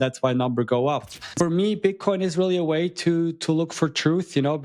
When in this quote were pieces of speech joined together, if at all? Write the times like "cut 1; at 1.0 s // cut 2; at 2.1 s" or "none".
cut 1; at 1.3 s